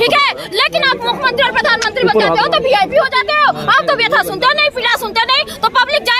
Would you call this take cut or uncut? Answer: uncut